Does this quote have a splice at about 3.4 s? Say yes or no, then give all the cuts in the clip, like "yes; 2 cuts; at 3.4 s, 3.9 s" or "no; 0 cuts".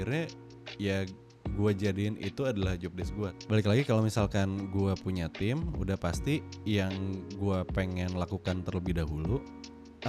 yes; 1 cut; at 3.4 s